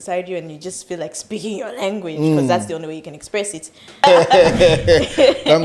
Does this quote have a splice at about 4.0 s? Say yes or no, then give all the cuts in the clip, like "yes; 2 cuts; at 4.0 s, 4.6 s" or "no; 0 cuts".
yes; 1 cut; at 4.0 s